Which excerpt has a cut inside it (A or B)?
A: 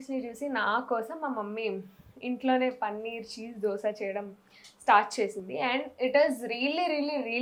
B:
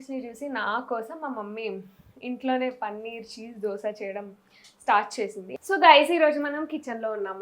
B